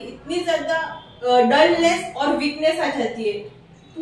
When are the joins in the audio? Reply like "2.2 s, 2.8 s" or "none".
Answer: 1.0 s